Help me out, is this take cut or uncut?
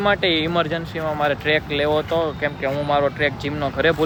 uncut